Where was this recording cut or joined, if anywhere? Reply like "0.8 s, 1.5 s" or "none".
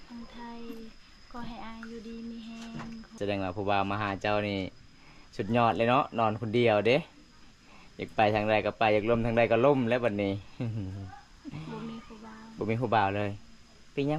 3.1 s

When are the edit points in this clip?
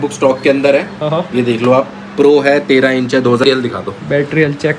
3.4 s

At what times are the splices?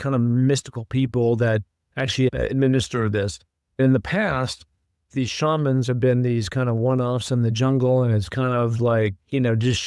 none

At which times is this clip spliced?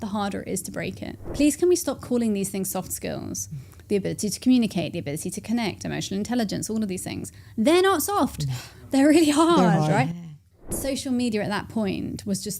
1.2 s, 10.7 s

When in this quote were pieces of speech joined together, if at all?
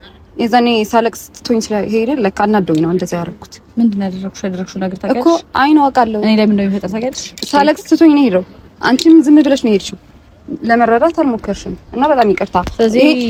none

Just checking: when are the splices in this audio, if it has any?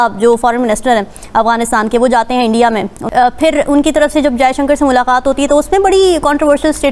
3.0 s

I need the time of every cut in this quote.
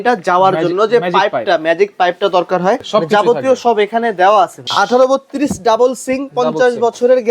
2.8 s, 4.7 s

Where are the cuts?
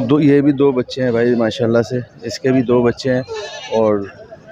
none

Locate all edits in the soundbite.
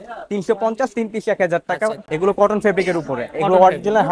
2.1 s

